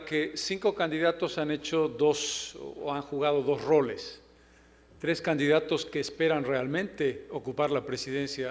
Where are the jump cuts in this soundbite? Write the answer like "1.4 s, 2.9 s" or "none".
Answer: 3.4 s